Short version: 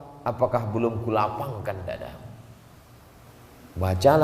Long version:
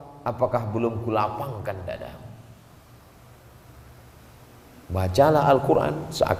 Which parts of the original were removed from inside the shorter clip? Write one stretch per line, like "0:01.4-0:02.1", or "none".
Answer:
0:03.3-0:04.4